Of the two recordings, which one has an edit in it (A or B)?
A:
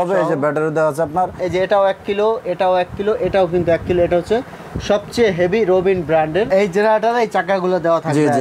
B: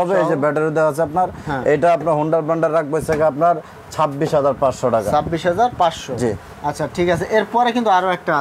A